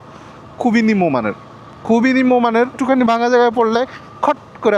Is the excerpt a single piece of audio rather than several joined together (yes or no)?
no